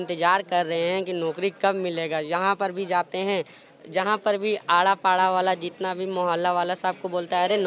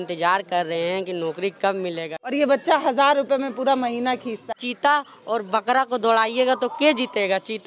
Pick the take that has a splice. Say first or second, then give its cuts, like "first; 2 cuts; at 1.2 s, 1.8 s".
second; 2 cuts; at 2.3 s, 4.4 s